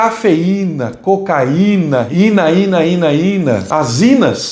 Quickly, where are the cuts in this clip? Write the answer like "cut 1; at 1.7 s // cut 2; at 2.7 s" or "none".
cut 1; at 2.1 s // cut 2; at 3.6 s